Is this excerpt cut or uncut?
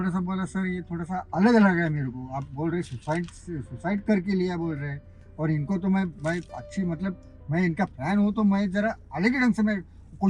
uncut